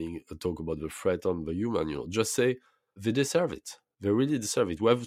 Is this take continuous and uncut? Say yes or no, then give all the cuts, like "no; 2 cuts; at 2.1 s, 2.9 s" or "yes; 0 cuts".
no; 1 cut; at 2.9 s